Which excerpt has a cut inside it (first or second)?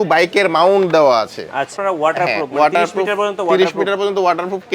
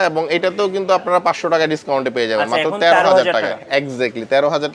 first